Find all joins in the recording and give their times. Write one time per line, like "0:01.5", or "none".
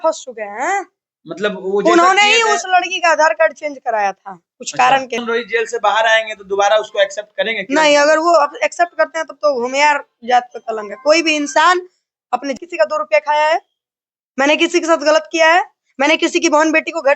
0:05.2
0:12.5